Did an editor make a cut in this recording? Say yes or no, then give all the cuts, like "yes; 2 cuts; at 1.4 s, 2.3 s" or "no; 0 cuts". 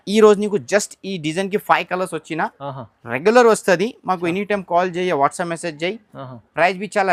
no; 0 cuts